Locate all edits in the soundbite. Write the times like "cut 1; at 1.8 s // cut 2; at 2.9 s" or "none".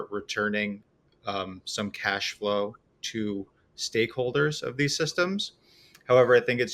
none